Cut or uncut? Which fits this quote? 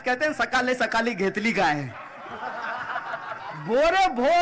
uncut